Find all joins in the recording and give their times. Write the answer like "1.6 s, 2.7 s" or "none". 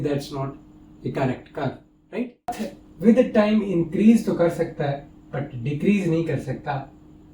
2.7 s